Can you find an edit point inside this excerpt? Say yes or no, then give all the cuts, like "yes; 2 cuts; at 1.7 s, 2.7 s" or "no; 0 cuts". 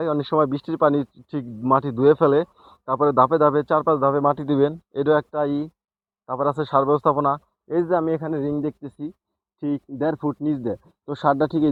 no; 0 cuts